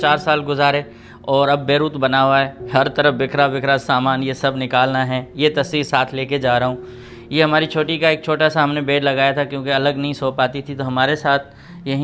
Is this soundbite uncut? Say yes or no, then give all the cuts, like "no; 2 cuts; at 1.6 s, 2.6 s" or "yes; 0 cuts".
yes; 0 cuts